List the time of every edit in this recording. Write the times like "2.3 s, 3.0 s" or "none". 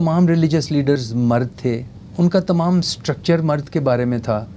1.0 s, 2.0 s